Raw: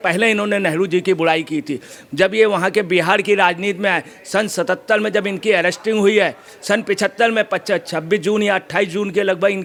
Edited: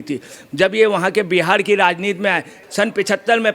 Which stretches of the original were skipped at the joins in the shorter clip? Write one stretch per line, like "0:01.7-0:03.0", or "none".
0:04.2-0:06.5